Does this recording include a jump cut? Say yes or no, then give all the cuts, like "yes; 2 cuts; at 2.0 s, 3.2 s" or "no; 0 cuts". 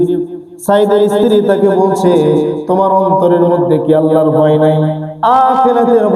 no; 0 cuts